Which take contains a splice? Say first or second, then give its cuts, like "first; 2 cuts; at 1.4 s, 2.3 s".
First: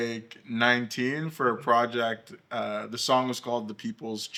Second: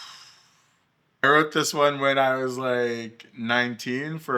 second; 1 cut; at 1.2 s